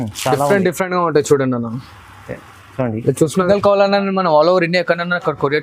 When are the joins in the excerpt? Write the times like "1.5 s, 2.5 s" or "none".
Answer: 3.3 s